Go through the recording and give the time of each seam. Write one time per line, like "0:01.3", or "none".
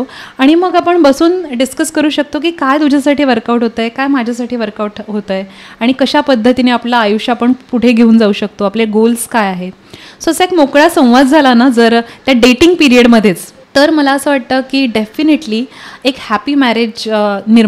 0:13.5